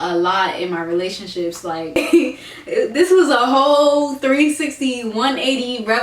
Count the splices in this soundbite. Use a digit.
1